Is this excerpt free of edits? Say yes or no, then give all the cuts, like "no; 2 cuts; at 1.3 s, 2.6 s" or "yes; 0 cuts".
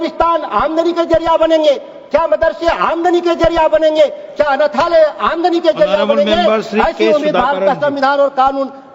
yes; 0 cuts